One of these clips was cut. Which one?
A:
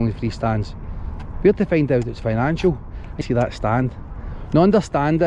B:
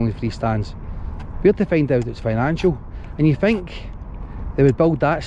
A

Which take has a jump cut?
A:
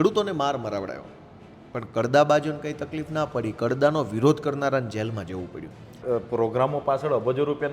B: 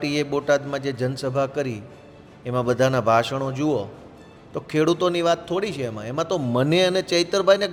A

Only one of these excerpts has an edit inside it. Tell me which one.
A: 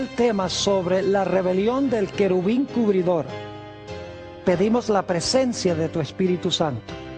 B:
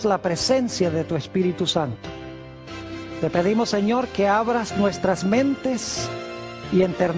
B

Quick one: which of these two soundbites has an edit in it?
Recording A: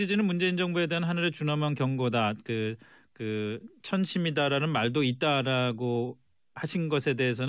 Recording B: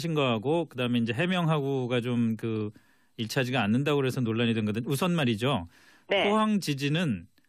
B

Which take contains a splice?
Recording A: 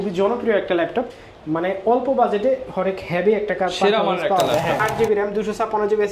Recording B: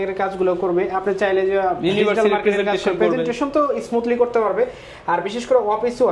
A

